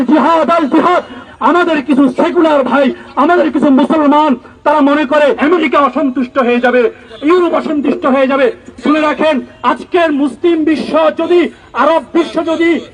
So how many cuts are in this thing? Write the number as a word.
two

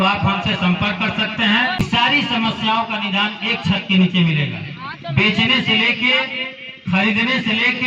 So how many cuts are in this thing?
one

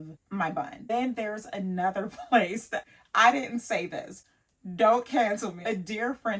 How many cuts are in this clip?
three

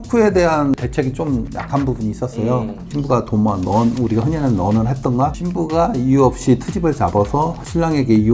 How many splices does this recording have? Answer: one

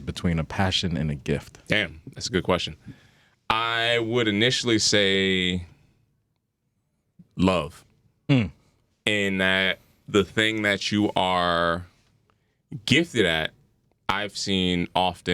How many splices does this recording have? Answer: zero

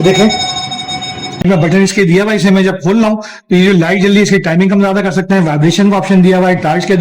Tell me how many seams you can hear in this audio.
one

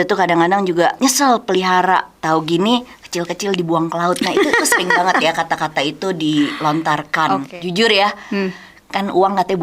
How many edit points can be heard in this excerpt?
three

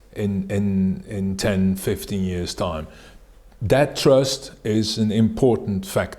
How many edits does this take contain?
zero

